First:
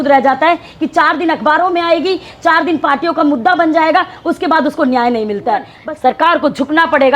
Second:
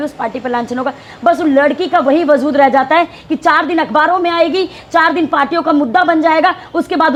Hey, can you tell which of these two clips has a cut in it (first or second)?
first